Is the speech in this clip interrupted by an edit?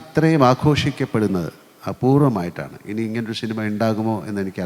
no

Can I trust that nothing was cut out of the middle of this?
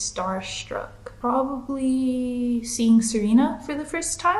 no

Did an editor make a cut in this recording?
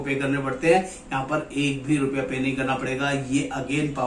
no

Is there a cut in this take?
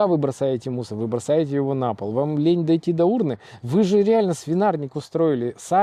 no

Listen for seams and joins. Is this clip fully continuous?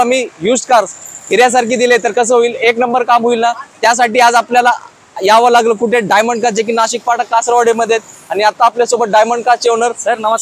yes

